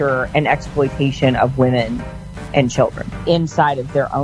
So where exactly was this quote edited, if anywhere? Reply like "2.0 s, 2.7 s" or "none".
3.1 s